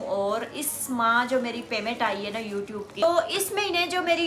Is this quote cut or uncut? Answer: cut